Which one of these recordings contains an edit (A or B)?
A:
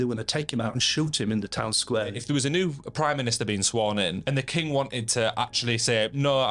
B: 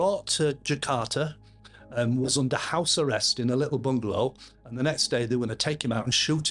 A